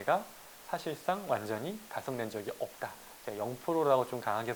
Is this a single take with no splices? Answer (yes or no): yes